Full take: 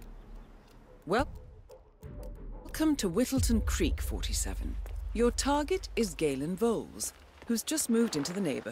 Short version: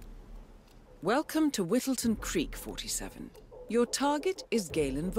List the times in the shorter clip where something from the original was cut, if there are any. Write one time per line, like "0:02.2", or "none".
0:01.1